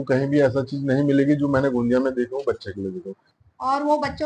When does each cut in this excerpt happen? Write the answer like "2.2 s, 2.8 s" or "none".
3.3 s